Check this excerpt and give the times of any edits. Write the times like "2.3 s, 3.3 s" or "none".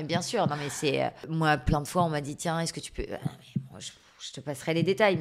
1.2 s